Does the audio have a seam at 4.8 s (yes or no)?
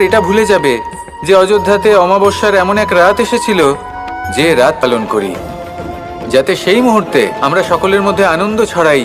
yes